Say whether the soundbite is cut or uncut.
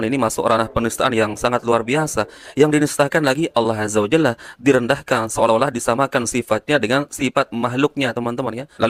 uncut